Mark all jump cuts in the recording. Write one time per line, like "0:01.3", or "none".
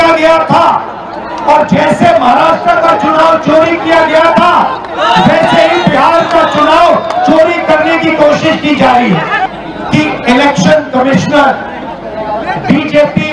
0:09.4